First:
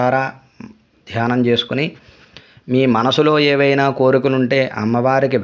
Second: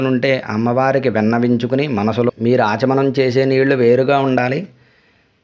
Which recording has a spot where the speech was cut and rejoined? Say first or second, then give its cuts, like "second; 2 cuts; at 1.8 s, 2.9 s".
second; 1 cut; at 2.3 s